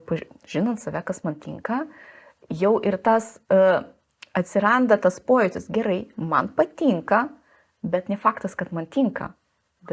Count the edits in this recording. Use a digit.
0